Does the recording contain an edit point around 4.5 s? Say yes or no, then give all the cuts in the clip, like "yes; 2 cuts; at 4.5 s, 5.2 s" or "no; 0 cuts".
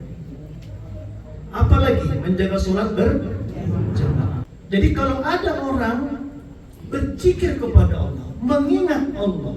yes; 1 cut; at 4.5 s